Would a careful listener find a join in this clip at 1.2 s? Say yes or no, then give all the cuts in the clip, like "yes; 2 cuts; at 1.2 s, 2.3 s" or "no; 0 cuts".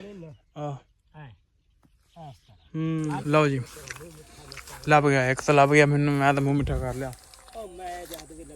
no; 1 cut; at 3.2 s